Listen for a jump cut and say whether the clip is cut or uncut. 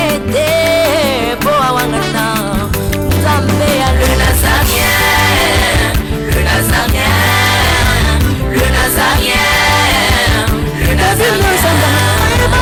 uncut